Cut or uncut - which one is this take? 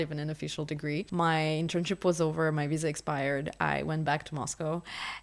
cut